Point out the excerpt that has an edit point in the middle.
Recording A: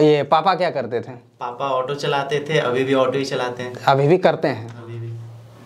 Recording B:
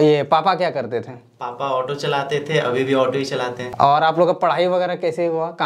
B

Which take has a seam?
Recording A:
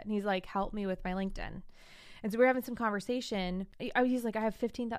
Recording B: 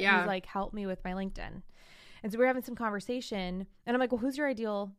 A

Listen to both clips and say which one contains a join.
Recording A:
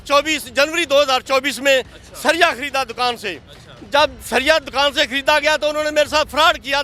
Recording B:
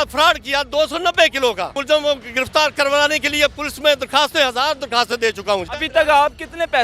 B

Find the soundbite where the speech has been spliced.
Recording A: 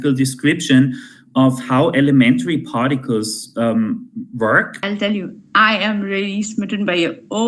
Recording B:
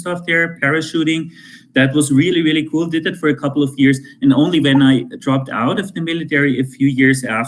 A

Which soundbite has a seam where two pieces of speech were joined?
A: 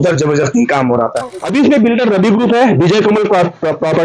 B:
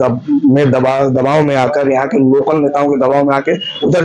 A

